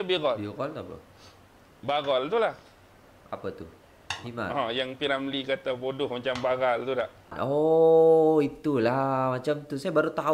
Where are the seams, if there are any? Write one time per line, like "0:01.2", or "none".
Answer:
0:07.4